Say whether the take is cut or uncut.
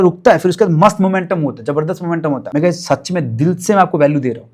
cut